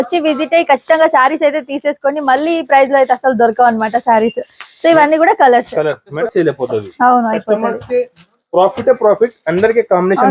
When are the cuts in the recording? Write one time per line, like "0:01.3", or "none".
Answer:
0:06.2

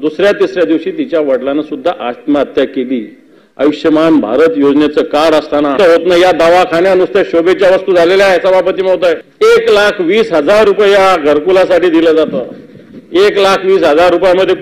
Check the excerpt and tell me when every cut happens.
0:05.8
0:09.3

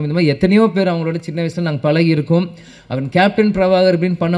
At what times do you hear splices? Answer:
none

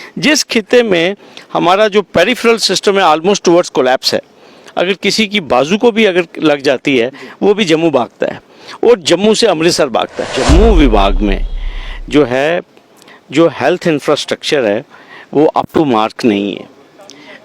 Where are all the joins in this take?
0:10.3

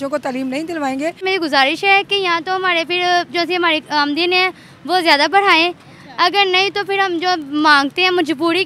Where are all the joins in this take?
0:01.2

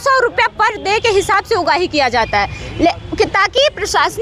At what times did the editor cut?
none

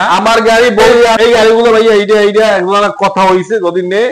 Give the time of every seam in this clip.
0:01.2

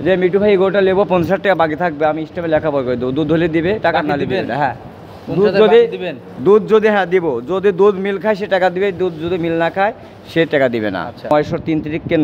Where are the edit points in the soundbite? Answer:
0:11.3

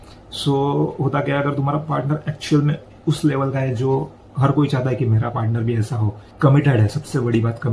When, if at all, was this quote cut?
0:06.2

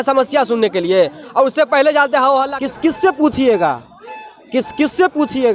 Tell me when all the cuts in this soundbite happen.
0:02.5

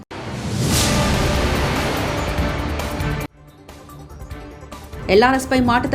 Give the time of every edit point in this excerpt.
0:04.6

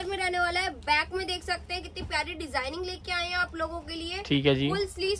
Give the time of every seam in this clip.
none

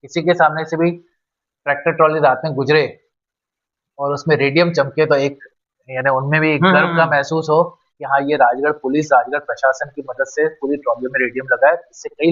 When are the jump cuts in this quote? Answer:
none

